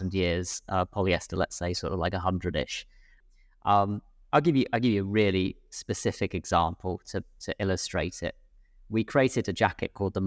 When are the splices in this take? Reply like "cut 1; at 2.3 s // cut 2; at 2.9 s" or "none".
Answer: cut 1; at 3.2 s